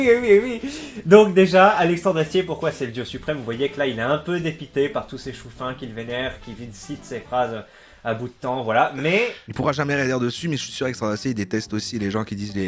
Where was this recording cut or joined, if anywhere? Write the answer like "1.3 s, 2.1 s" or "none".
9.4 s